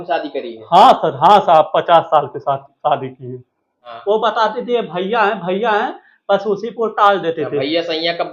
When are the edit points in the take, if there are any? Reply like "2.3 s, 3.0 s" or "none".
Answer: 3.8 s